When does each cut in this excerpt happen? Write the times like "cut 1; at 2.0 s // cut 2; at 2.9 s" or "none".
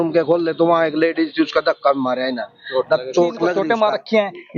cut 1; at 3.6 s